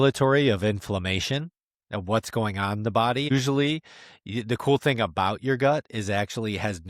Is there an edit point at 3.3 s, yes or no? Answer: yes